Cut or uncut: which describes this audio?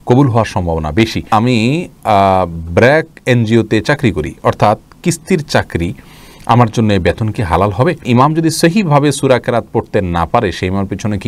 cut